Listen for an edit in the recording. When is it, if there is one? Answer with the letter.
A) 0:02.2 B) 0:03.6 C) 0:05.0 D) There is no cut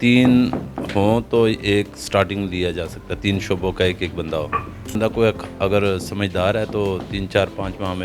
C